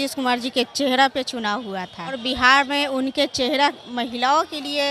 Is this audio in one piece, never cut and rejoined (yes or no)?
no